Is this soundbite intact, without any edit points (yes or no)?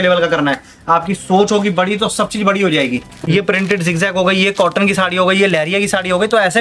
no